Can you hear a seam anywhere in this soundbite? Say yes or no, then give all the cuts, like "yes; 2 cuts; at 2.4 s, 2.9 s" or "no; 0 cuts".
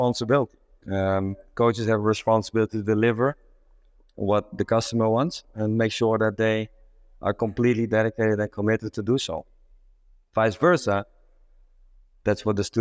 no; 0 cuts